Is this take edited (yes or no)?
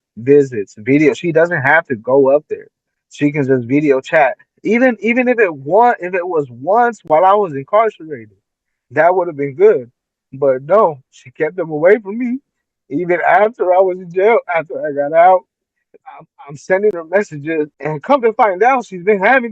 yes